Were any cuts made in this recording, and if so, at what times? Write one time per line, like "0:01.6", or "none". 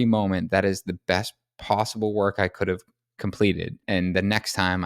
0:03.8